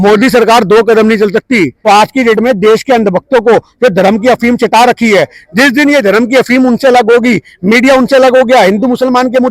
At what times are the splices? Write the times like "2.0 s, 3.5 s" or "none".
1.8 s